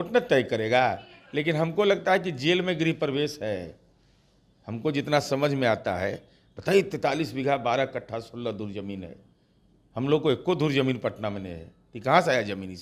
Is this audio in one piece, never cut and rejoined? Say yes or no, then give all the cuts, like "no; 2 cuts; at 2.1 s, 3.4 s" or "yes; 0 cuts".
yes; 0 cuts